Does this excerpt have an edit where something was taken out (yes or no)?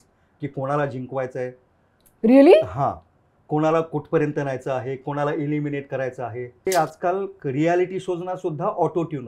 yes